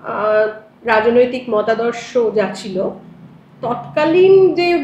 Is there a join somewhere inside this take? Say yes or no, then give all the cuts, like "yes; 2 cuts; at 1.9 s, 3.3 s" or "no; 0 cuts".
no; 0 cuts